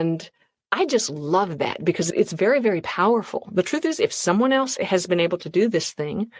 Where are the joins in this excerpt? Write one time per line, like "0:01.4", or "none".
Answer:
0:02.0
0:04.7